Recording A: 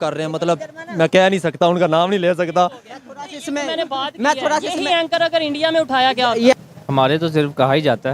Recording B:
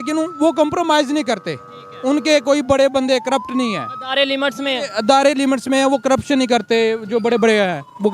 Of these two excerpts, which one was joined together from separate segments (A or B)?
A